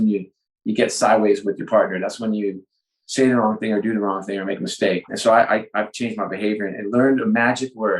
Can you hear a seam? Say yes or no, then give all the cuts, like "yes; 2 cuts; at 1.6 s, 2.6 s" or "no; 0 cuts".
yes; 1 cut; at 5.1 s